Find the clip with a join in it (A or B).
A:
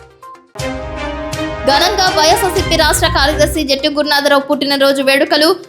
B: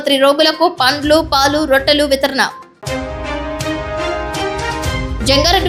A